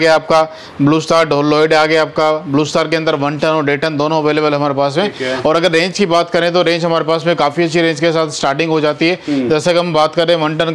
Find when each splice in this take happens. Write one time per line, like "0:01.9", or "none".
none